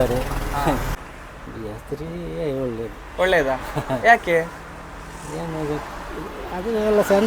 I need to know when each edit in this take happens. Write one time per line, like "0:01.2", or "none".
0:01.0